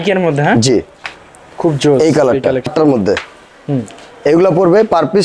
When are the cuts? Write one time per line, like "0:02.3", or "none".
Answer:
0:02.7